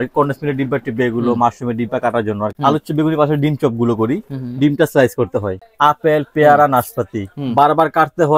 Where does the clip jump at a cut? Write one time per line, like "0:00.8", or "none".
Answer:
0:02.5
0:05.6